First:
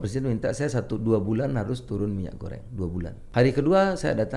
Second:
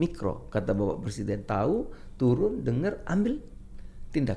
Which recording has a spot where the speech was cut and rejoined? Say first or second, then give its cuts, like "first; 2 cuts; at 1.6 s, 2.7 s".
first; 1 cut; at 3.2 s